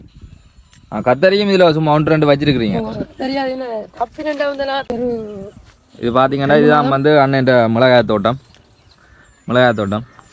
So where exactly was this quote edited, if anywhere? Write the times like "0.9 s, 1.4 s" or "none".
4.8 s